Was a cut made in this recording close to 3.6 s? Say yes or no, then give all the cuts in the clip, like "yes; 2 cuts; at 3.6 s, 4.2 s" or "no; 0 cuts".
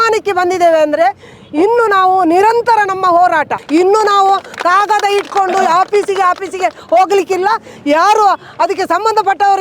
yes; 1 cut; at 3.6 s